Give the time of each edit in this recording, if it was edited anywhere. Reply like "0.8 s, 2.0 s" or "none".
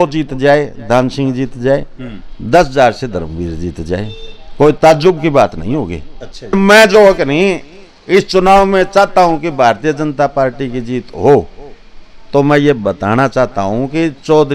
6.5 s